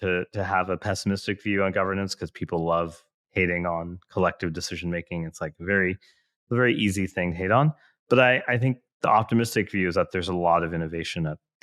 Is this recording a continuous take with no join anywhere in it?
yes; 0 cuts

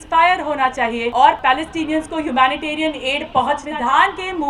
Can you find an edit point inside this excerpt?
yes; 2 cuts; at 1.4 s, 3.7 s

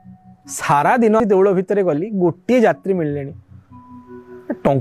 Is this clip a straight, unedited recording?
no; 1 cut; at 1.2 s

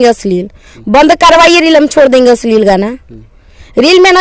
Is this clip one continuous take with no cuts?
yes; 0 cuts

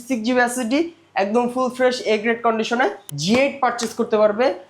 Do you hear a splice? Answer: yes; 1 cut; at 3.1 s

